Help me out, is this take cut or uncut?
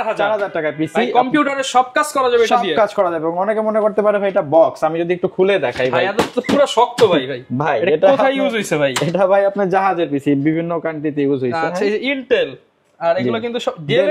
uncut